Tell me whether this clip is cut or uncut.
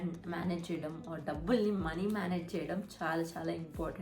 uncut